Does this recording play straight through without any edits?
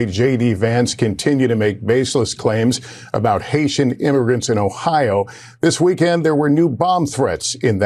yes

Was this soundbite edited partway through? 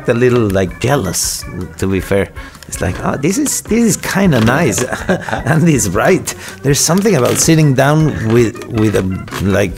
no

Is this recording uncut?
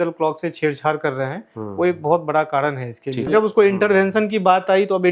no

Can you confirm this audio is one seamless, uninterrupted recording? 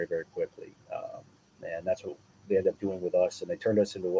yes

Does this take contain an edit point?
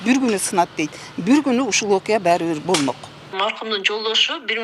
yes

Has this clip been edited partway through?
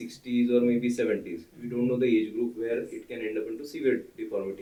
no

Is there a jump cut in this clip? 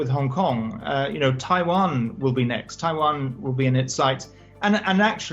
no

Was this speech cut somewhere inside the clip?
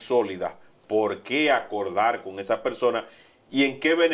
no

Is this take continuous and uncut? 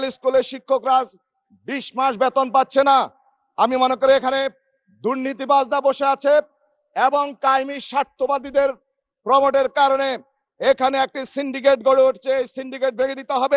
yes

